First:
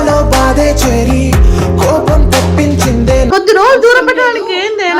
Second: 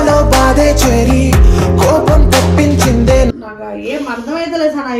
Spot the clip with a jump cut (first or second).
first